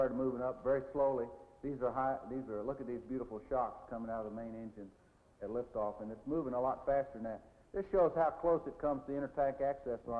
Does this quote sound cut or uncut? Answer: cut